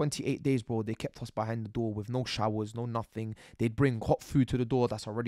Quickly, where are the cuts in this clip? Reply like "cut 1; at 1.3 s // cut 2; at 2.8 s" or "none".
none